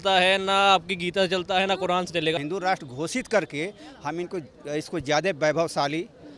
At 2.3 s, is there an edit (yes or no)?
yes